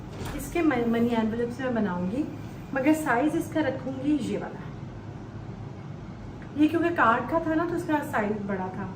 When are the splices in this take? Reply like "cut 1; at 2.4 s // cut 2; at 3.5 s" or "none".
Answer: none